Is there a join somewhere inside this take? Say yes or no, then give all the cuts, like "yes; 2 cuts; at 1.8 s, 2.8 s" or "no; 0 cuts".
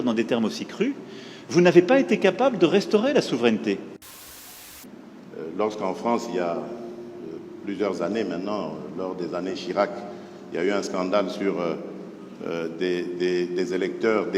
yes; 1 cut; at 4.5 s